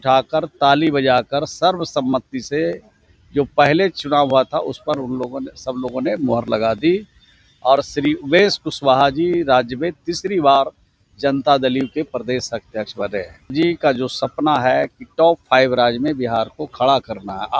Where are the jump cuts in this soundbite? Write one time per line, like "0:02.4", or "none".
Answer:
0:13.5